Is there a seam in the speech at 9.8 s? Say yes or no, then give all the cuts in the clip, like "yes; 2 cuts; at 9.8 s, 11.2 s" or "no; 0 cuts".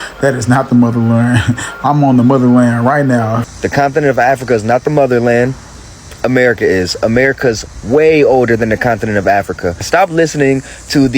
yes; 2 cuts; at 3.4 s, 9.8 s